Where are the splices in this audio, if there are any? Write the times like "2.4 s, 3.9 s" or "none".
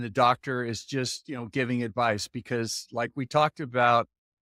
none